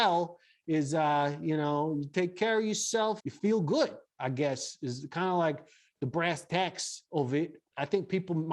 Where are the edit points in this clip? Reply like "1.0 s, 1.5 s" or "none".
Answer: 3.2 s, 7.6 s